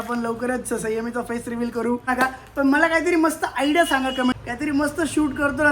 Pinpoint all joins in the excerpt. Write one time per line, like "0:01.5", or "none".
0:02.1
0:04.3